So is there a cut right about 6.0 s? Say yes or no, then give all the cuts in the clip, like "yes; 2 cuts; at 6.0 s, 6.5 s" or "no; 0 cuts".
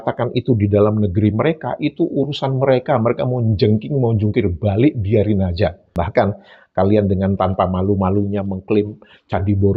yes; 1 cut; at 6.0 s